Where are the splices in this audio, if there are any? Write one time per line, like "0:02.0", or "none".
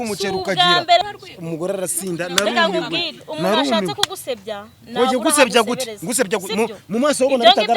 0:01.0